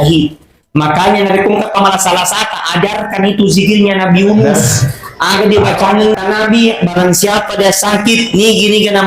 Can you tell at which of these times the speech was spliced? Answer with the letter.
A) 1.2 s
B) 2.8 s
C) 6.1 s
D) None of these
C